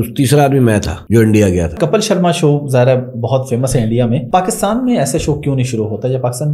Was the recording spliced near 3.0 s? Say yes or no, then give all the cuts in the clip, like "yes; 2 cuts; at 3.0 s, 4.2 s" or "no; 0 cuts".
no; 3 cuts; at 1.0 s, 1.8 s, 4.2 s